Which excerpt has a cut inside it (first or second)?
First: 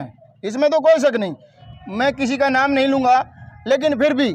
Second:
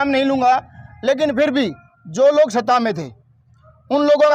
first